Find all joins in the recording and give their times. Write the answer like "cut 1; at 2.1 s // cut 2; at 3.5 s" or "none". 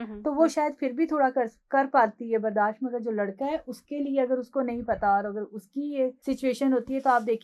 cut 1; at 6.2 s